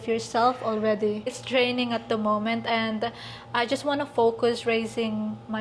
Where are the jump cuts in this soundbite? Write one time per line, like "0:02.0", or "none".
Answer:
0:01.4